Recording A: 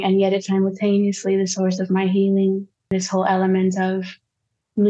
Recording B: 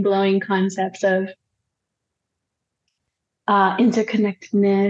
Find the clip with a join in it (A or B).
A